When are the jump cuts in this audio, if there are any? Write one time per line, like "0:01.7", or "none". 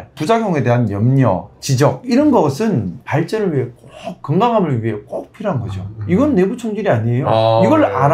none